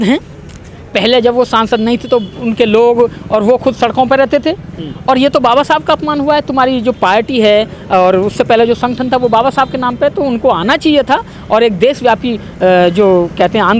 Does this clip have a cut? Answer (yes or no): no